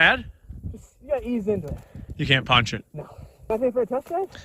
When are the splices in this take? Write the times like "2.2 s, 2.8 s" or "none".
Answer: 3.5 s